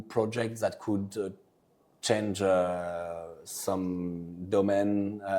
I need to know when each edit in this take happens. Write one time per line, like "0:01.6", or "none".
none